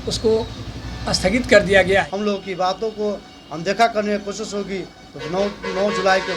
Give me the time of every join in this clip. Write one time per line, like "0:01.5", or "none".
0:02.1